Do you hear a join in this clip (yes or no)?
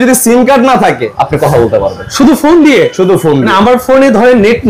yes